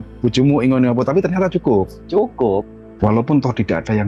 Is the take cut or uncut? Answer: cut